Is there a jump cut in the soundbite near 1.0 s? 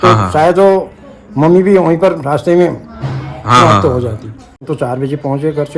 no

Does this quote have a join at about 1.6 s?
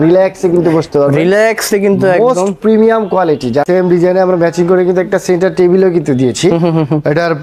no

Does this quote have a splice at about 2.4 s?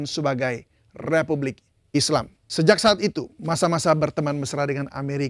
yes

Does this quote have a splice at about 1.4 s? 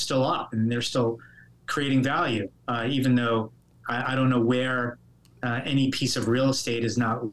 no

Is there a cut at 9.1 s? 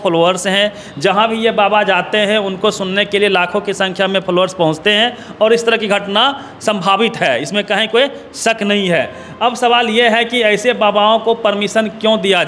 no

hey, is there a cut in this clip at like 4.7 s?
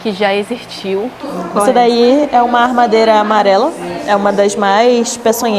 no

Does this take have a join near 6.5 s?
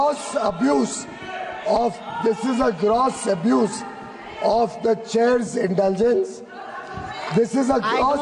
no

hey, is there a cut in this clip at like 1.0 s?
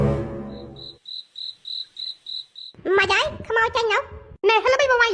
yes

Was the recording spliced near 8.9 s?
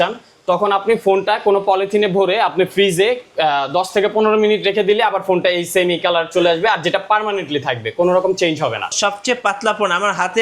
yes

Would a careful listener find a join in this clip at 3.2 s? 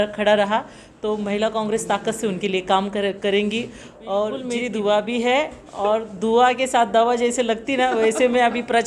no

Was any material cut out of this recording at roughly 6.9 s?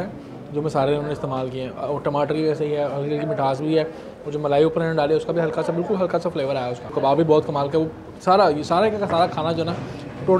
yes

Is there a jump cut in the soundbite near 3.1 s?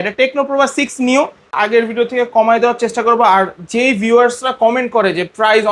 no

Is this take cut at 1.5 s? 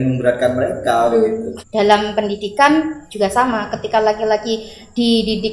yes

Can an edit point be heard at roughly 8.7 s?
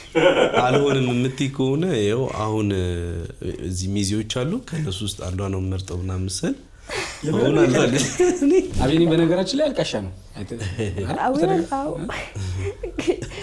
yes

